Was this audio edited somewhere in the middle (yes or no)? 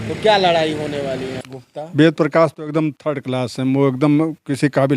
yes